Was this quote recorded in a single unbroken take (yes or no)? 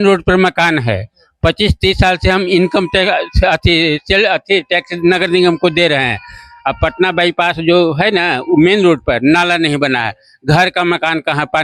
yes